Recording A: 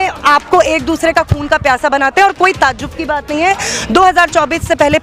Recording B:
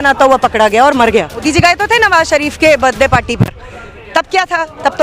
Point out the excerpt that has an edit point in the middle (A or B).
B